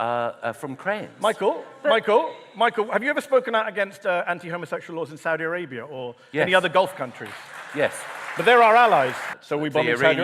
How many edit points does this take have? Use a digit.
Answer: 1